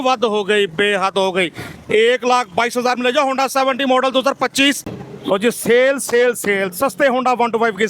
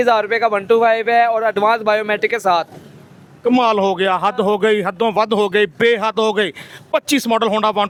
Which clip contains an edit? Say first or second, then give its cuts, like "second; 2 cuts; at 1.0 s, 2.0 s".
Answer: first; 1 cut; at 4.9 s